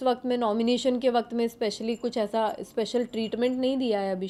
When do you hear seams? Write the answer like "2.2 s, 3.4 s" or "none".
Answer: none